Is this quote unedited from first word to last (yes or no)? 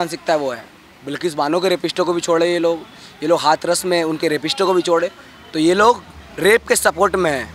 yes